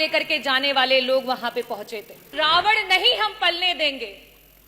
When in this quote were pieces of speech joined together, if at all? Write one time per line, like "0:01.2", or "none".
0:02.3